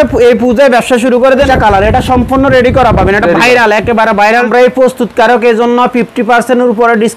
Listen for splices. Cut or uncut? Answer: cut